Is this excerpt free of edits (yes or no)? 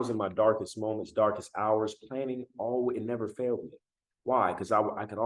yes